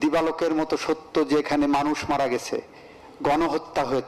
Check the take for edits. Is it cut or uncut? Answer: uncut